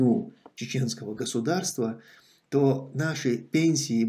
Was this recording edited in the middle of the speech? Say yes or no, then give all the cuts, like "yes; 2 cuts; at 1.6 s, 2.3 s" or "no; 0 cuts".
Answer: no; 0 cuts